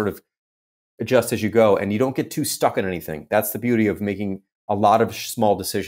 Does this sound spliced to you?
no; 0 cuts

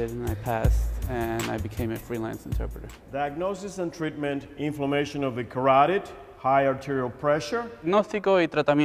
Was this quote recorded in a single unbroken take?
yes; 0 cuts

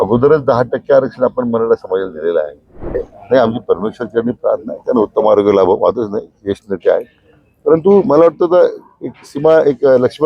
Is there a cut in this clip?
yes; 1 cut; at 2.8 s

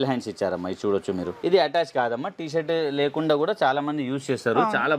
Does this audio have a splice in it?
yes; 1 cut; at 1.4 s

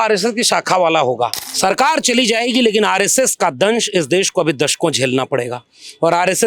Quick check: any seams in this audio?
yes; 1 cut; at 1.4 s

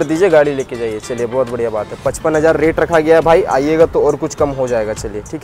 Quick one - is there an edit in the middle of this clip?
no; 0 cuts

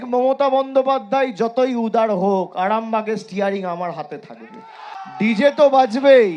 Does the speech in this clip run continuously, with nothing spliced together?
no; 1 cut; at 5.0 s

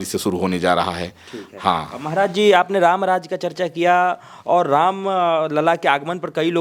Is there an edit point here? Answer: no; 0 cuts

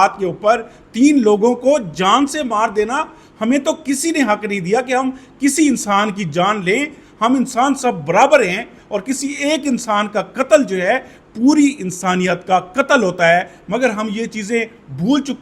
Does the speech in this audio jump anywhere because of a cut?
no; 0 cuts

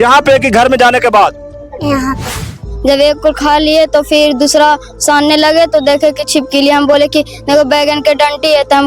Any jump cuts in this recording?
yes; 1 cut; at 2.4 s

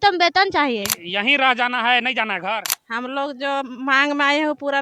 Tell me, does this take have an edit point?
yes; 2 cuts; at 1.0 s, 2.8 s

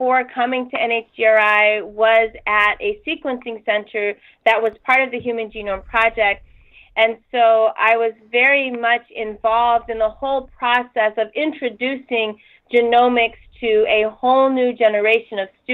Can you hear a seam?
no; 0 cuts

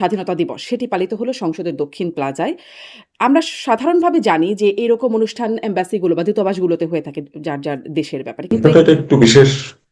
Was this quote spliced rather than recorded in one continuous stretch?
yes; 1 cut; at 8.5 s

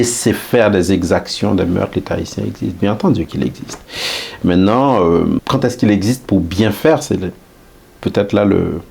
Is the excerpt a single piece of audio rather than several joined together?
no; 1 cut; at 5.4 s

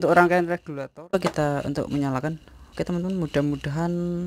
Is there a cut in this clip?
yes; 1 cut; at 1.1 s

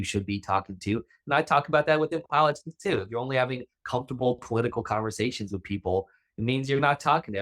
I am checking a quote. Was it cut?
no; 0 cuts

